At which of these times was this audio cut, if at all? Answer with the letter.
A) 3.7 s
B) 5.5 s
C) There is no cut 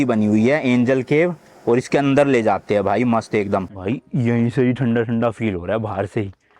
A